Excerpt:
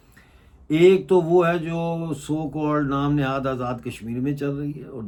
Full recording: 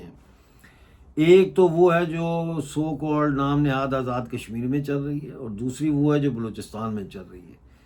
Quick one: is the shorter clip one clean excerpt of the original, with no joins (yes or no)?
yes